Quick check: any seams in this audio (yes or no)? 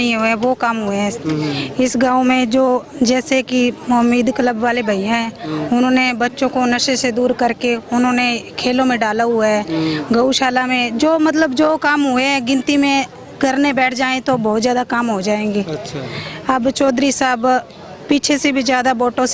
no